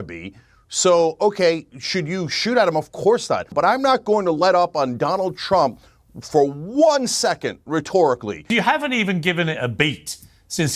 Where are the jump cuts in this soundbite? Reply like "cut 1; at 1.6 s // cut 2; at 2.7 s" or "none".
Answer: cut 1; at 3.5 s // cut 2; at 8.4 s